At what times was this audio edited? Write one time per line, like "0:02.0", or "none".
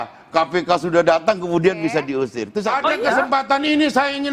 0:02.5